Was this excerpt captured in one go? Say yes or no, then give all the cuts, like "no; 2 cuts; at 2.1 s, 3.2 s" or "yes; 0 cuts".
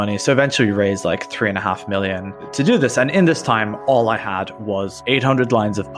no; 1 cut; at 2.4 s